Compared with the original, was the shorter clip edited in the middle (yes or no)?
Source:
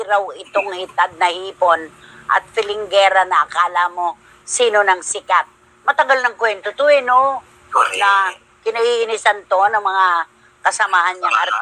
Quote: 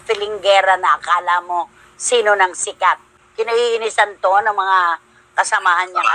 yes